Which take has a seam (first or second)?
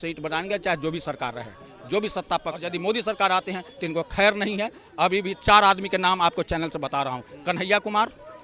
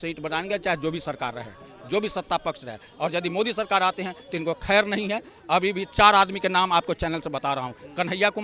first